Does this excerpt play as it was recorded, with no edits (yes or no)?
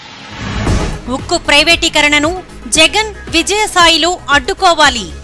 yes